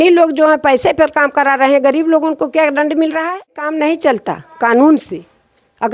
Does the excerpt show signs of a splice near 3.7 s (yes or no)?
yes